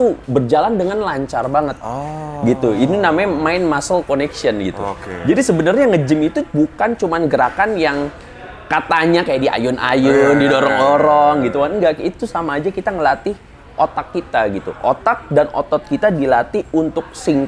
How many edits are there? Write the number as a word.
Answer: zero